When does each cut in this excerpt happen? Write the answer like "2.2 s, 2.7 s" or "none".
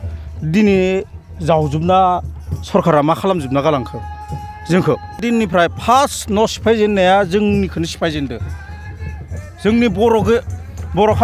5.2 s